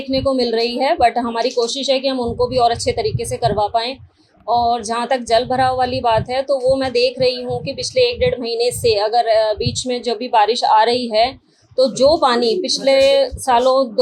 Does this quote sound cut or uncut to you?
uncut